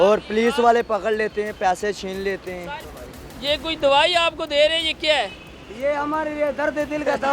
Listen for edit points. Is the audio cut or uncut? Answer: cut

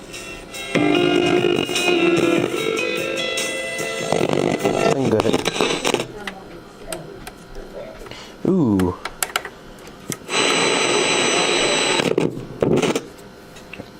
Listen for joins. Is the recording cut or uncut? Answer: uncut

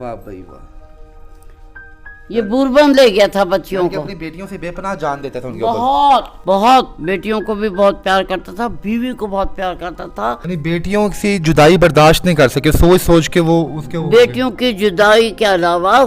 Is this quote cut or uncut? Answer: cut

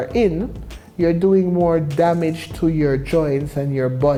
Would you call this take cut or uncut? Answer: uncut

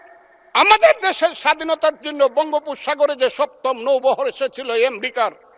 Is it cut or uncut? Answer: uncut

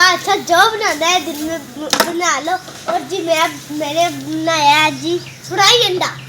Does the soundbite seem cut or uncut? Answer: cut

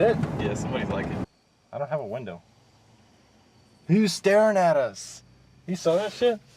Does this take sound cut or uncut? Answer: cut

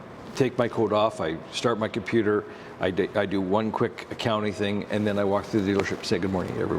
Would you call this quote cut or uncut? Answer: uncut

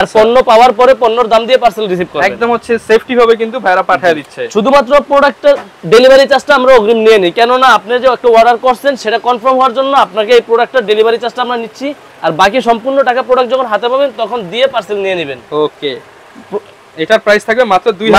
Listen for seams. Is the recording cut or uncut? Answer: uncut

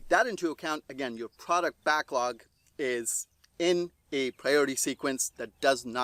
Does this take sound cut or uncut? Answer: uncut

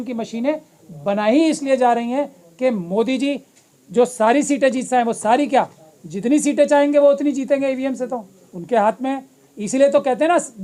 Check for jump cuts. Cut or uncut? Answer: uncut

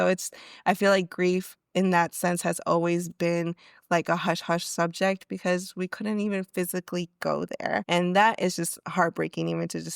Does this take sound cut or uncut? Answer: cut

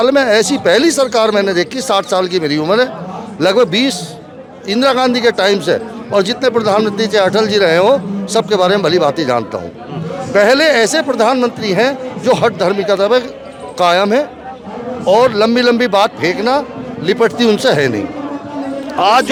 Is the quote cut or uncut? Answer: uncut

